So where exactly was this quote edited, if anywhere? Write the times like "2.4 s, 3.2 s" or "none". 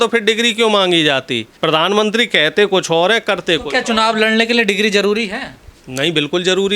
1.4 s

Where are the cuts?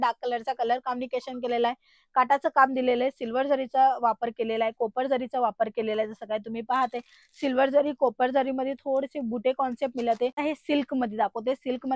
10.4 s

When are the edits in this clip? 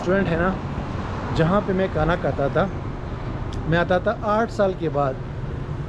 none

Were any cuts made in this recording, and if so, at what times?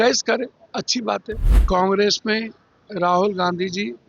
1.5 s

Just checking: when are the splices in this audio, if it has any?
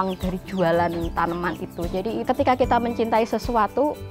2.2 s

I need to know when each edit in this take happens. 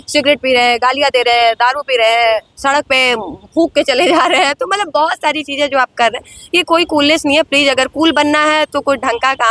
none

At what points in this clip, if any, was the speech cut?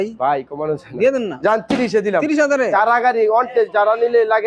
2.6 s

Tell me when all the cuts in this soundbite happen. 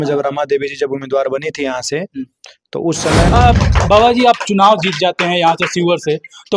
3.3 s

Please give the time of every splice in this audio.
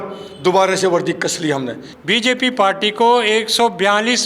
1.8 s

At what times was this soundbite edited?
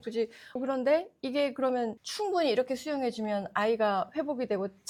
none

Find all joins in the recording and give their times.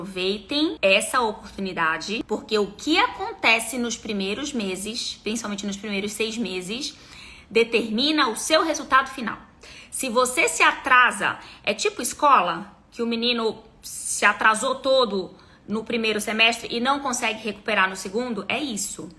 0.8 s, 2.2 s

